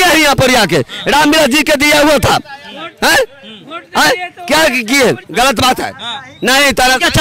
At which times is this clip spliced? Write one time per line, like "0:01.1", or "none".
0:05.2